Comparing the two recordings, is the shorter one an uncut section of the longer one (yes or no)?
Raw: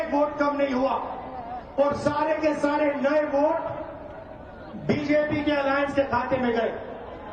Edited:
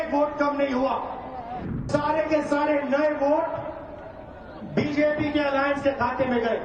no